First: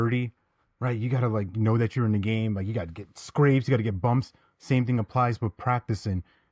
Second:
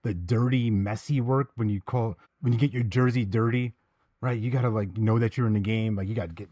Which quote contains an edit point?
second; 1 cut; at 2.3 s

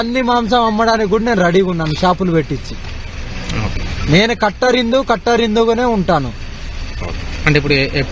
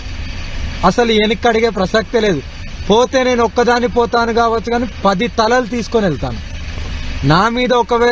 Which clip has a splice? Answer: first; 1 cut; at 2.2 s

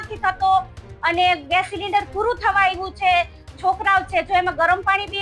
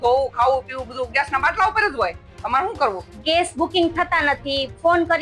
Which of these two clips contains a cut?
second; 1 cut; at 3.1 s

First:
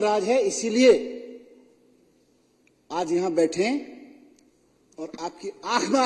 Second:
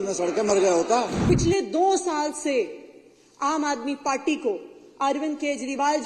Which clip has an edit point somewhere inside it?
second; 1 cut; at 1.2 s

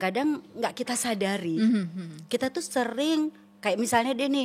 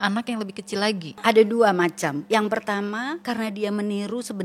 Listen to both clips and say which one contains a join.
second; 3 cuts; at 1.2 s, 2.2 s, 3.2 s

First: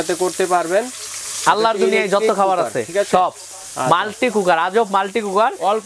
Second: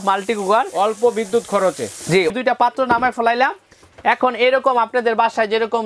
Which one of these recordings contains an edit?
second; 1 cut; at 2.3 s

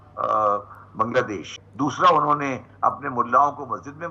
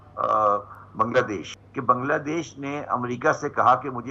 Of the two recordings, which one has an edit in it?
first; 1 cut; at 1.6 s

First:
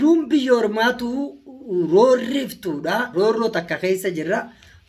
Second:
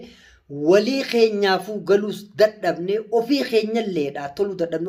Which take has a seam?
first; 1 cut; at 3.1 s

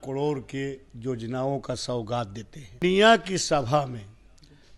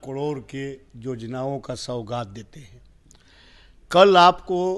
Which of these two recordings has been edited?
first; 1 cut; at 2.8 s

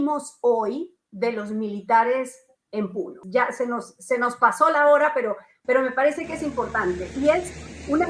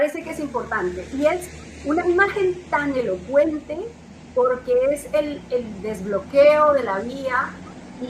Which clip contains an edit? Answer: first; 1 cut; at 3.2 s

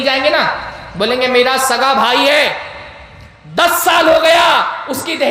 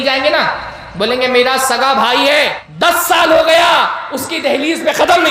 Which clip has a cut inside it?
second; 1 cut; at 2.6 s

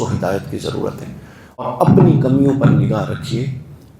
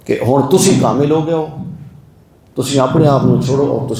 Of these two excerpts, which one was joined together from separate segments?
first; 1 cut; at 1.6 s

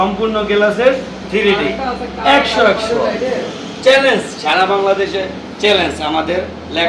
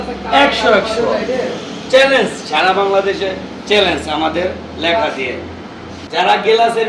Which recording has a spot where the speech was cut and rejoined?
second; 1 cut; at 6.0 s

